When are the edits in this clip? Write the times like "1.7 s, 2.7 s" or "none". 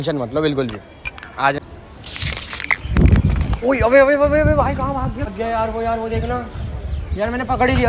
1.6 s, 5.3 s